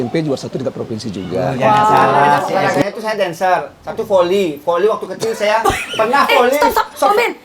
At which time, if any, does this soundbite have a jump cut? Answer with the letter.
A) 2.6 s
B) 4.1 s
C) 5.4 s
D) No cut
A